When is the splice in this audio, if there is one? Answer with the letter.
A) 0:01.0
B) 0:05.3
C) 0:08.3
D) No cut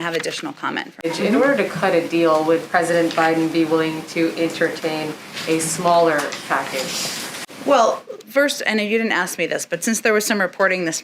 A